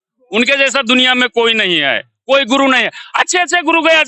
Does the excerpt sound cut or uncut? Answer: uncut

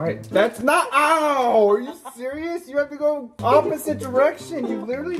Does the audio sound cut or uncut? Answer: cut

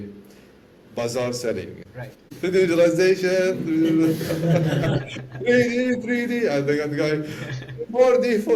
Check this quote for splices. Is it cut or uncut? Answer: uncut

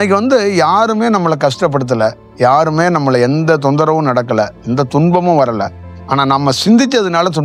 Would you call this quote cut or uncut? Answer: uncut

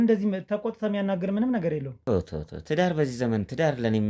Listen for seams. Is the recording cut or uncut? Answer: cut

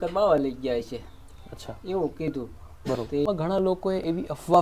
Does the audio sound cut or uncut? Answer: cut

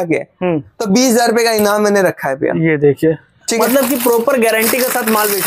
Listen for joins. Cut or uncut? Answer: uncut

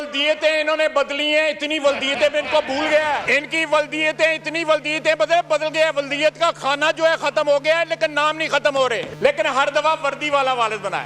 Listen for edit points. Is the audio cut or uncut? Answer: cut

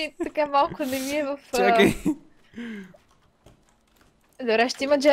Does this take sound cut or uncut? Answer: uncut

